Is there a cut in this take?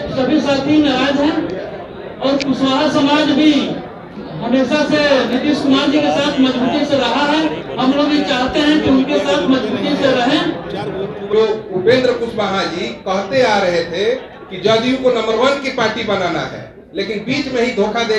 yes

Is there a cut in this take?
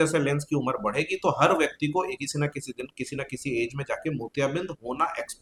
no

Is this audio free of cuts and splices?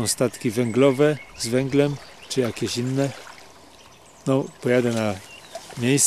no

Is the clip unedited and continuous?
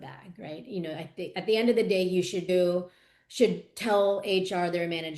no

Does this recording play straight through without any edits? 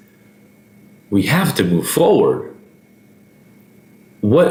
yes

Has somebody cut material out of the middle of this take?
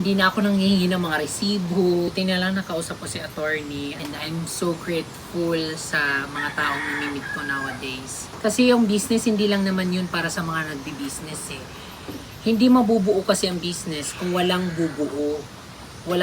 yes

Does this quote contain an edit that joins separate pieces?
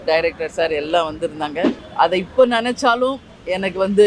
yes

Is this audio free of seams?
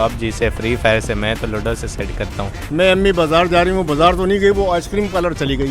no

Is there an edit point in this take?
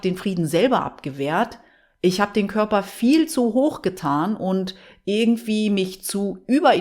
no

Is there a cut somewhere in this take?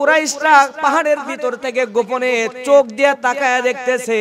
no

